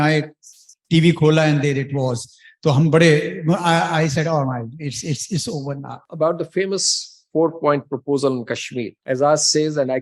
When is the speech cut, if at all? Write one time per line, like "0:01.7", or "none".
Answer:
0:06.0
0:08.9